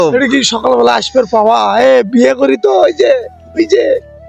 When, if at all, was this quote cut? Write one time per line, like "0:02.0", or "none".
none